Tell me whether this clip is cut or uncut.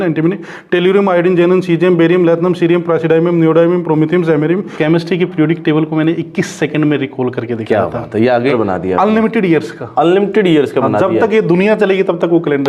cut